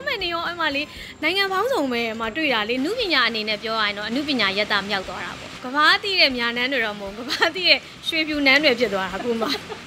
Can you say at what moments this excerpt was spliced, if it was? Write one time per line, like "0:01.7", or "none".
0:02.8
0:05.6